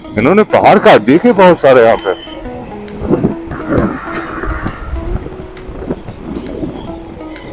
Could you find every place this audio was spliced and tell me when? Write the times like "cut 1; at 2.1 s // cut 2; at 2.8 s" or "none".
none